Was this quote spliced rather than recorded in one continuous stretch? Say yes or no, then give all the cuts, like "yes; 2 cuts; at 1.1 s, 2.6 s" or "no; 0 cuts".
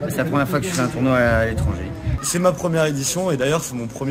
yes; 1 cut; at 2.2 s